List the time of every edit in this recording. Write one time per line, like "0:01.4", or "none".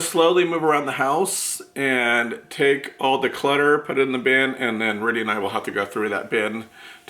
none